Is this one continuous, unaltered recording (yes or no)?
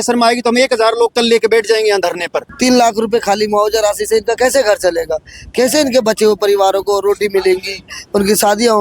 no